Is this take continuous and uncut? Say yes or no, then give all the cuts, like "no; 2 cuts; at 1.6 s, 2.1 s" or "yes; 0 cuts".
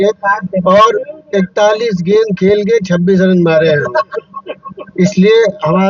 yes; 0 cuts